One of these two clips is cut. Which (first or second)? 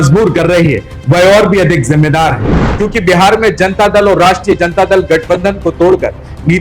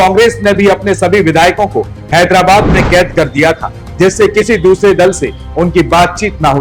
first